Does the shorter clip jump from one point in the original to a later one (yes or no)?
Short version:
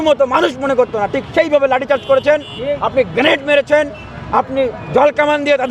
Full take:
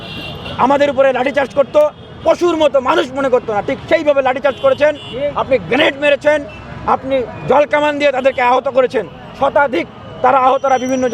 no